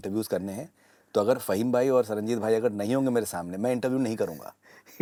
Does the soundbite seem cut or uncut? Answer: uncut